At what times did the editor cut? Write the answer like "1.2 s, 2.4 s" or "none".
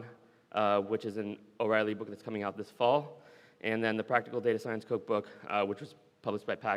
none